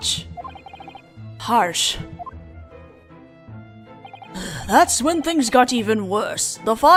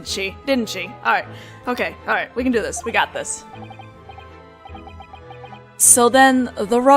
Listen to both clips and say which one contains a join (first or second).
second